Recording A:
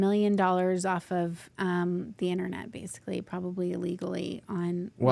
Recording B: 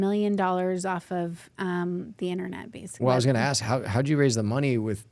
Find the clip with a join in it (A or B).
B